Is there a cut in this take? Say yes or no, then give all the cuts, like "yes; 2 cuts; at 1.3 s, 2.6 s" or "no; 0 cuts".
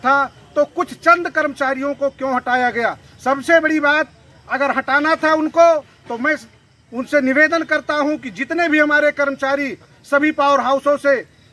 no; 0 cuts